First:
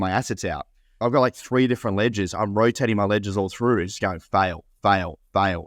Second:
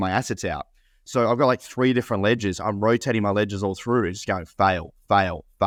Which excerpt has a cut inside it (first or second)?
first